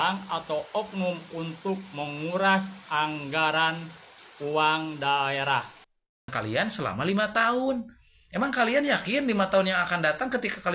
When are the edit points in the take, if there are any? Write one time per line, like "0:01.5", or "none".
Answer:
0:06.3

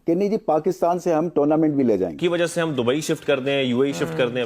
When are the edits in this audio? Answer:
0:02.2

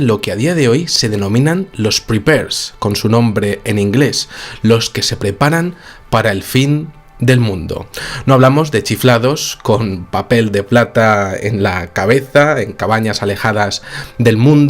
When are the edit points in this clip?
0:12.3

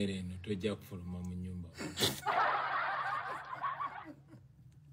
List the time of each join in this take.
0:02.2
0:03.9

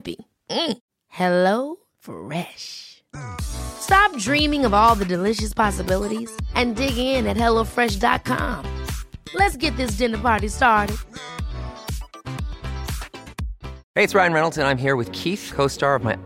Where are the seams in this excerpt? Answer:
0:13.8

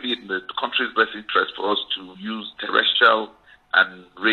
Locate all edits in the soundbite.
none

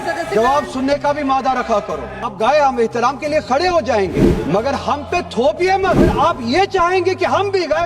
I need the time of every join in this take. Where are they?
0:02.3
0:04.3
0:06.1

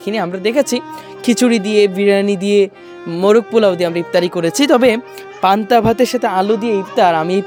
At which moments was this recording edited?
none

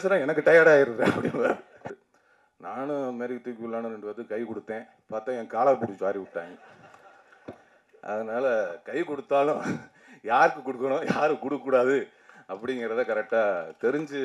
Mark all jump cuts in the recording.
0:01.8

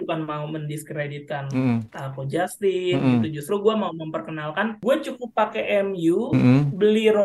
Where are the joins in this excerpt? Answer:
0:04.8

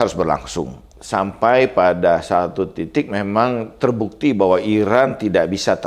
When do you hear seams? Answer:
none

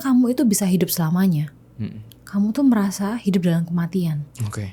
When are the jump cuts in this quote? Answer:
none

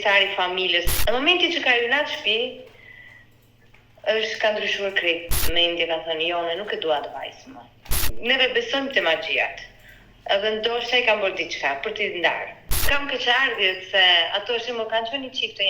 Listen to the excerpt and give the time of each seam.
0:00.9
0:05.4
0:07.9
0:12.9

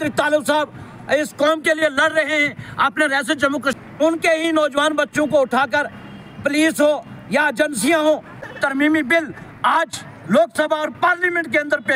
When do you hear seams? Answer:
0:03.7
0:08.4

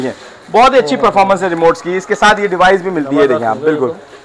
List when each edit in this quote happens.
none

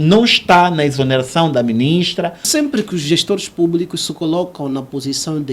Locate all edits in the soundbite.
0:02.5

